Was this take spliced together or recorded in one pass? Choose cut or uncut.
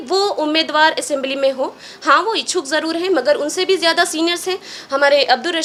uncut